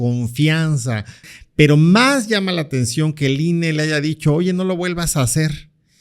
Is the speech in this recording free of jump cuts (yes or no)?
no